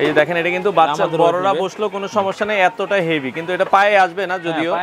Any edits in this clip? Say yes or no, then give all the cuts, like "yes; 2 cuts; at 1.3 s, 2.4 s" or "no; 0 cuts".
no; 0 cuts